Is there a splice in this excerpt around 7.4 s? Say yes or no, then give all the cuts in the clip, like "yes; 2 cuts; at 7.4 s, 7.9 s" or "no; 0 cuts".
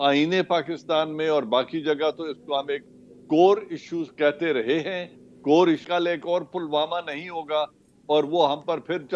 no; 1 cut; at 5.8 s